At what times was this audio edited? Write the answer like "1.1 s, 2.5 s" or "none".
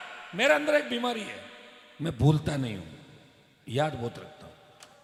none